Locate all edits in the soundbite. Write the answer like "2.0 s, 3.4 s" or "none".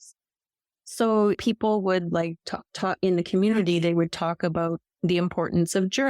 1.4 s